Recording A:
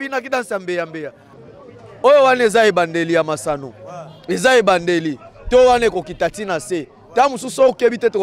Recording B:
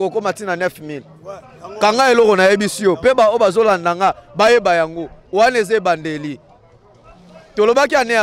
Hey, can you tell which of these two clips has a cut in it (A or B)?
A